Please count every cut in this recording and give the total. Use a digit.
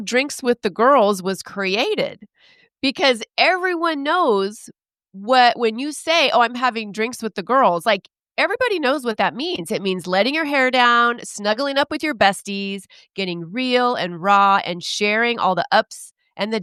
0